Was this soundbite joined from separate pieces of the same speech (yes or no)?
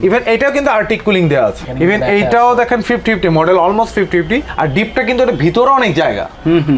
no